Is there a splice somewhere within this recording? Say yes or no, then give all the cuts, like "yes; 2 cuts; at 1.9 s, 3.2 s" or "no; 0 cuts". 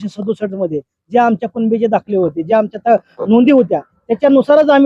no; 0 cuts